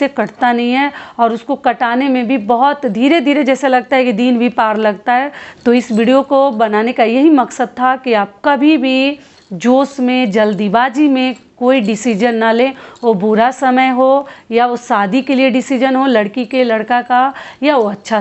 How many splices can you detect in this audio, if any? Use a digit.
1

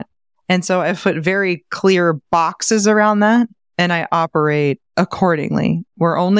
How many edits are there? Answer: 2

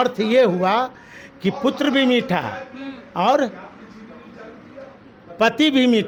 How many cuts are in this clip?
0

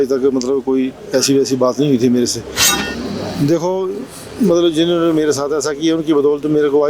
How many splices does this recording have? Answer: 0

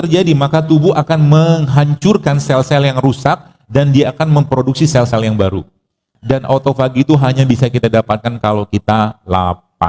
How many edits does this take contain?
1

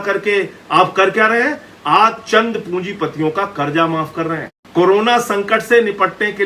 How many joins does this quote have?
1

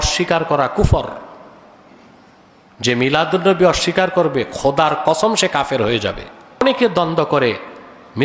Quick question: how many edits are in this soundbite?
1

